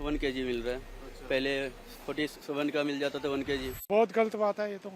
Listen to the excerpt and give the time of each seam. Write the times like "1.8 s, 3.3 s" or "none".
3.9 s